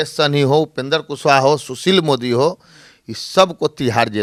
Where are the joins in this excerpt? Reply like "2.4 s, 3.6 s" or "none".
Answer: none